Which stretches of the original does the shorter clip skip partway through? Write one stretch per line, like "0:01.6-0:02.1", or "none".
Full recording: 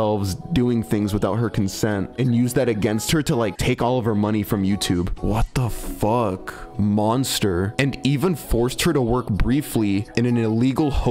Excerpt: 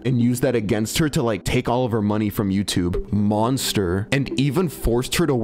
0:05.1-0:06.7